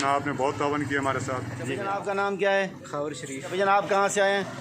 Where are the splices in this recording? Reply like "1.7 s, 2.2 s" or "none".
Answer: 1.7 s, 3.5 s